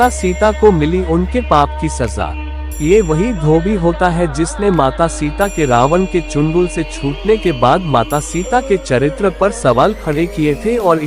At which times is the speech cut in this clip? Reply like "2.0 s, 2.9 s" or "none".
2.4 s